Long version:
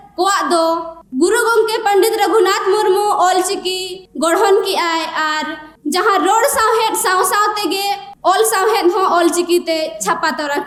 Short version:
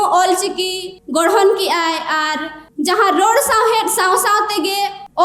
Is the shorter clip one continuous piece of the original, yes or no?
yes